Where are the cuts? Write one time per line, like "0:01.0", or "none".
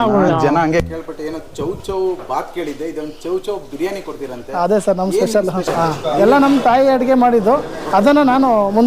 0:05.7